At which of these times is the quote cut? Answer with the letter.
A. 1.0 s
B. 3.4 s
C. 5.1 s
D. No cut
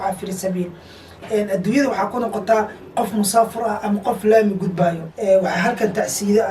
C